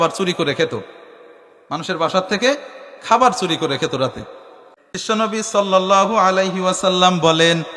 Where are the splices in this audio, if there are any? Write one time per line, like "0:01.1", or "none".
0:05.0